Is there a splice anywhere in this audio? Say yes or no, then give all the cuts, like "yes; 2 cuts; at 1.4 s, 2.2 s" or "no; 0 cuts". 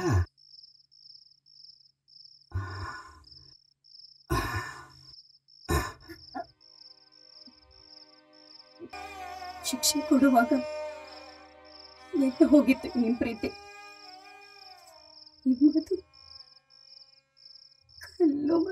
yes; 1 cut; at 8.9 s